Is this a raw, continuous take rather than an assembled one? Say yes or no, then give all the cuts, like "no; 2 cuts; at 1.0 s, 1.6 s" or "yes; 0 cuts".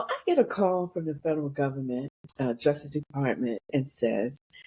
yes; 0 cuts